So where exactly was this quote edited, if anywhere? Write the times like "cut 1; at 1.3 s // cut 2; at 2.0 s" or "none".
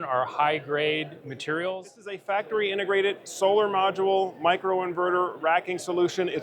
cut 1; at 2.2 s